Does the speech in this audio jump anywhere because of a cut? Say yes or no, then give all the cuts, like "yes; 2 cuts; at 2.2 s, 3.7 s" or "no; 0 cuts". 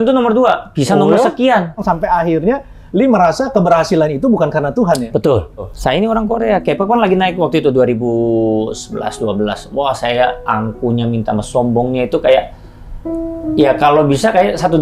yes; 2 cuts; at 1.8 s, 5.7 s